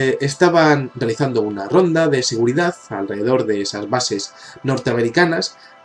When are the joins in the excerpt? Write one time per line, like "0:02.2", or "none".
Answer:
0:04.1